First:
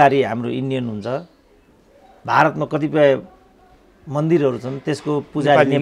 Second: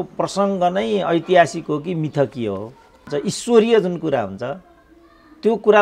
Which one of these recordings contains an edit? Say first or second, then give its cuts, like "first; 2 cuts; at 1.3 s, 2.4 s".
second; 1 cut; at 3.1 s